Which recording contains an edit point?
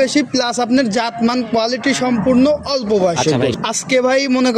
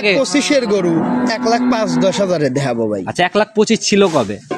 first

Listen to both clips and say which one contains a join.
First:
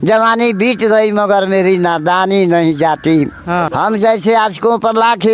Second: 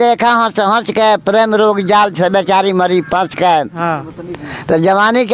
first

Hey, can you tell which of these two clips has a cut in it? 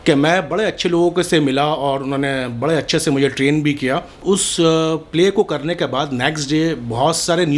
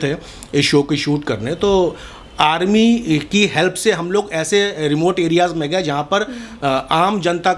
first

